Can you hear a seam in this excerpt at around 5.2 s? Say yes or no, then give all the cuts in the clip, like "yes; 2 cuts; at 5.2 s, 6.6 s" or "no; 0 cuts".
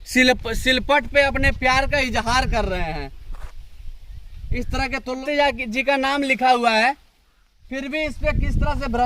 yes; 1 cut; at 5.2 s